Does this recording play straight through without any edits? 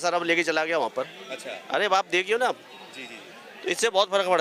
yes; 0 cuts

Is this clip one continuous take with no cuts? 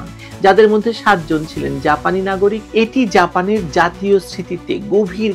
no; 1 cut; at 2.6 s

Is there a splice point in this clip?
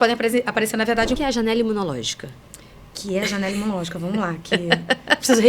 yes; 1 cut; at 1.2 s

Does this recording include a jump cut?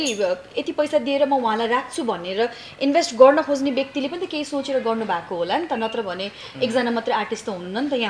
no; 0 cuts

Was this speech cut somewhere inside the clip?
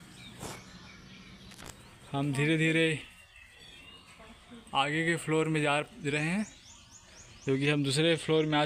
no; 0 cuts

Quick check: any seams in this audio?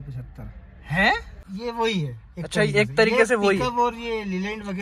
yes; 1 cut; at 1.4 s

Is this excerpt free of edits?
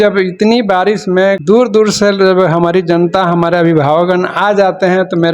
no; 1 cut; at 1.4 s

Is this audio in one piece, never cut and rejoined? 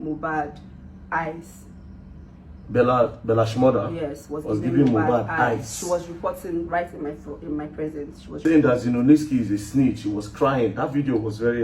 no; 1 cut; at 8.4 s

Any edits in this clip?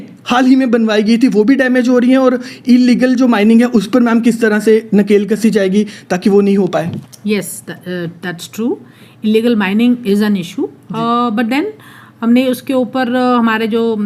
no; 0 cuts

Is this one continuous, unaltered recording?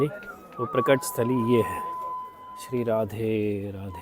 yes; 0 cuts

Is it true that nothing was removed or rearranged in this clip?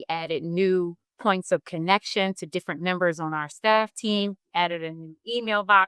yes; 0 cuts

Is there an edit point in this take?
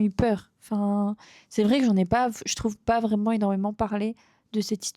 no; 0 cuts

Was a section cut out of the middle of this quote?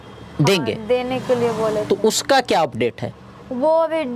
no; 0 cuts

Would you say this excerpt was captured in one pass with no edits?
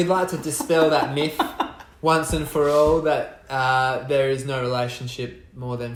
yes; 0 cuts

